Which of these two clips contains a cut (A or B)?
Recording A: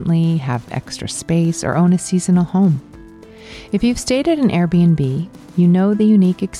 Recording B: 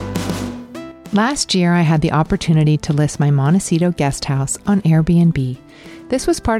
B